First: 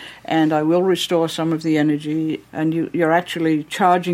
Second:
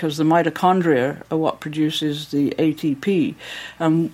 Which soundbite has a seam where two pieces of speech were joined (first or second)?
first